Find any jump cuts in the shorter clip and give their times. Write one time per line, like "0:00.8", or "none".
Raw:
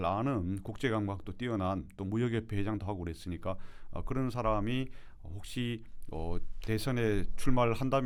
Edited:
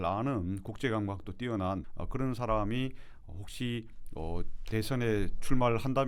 0:01.9